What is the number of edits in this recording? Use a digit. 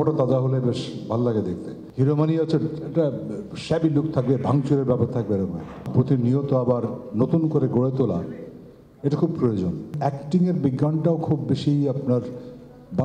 3